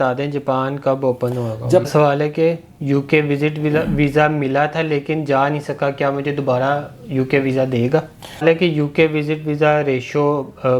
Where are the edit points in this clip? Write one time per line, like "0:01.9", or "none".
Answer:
0:01.9
0:08.4